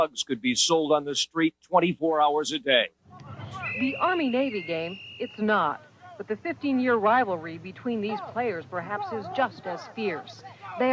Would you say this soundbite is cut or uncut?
cut